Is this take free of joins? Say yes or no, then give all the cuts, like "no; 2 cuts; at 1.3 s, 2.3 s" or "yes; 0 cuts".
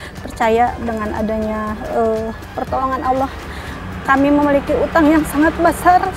yes; 0 cuts